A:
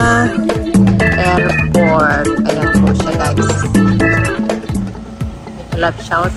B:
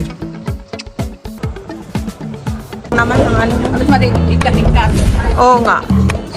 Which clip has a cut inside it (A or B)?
B